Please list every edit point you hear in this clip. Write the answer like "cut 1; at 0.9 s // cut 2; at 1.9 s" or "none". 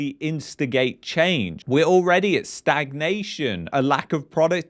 cut 1; at 1.6 s